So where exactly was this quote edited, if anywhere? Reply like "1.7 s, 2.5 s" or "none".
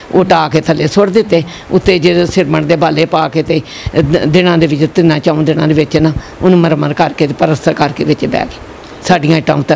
none